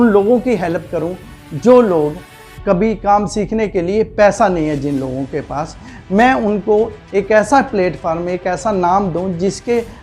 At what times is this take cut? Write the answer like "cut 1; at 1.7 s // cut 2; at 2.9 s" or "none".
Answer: none